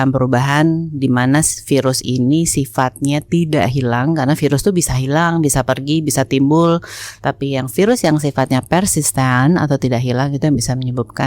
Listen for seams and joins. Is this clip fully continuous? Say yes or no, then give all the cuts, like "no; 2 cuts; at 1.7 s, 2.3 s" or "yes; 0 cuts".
yes; 0 cuts